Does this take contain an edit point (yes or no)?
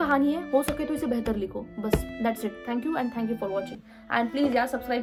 no